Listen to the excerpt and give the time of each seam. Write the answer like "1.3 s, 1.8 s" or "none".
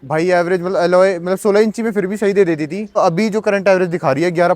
3.0 s